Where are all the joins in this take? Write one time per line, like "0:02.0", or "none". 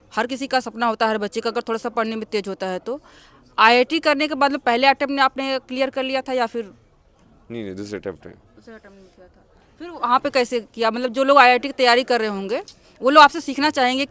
none